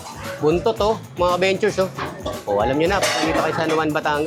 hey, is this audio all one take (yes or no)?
yes